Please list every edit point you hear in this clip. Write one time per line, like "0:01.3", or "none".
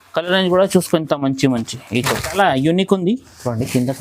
0:02.3